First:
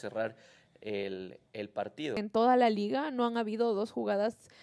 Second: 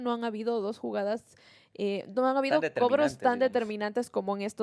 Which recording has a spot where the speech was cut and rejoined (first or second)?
first